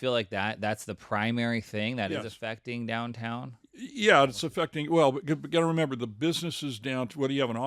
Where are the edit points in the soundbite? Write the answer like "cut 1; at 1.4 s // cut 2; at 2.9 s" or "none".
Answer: none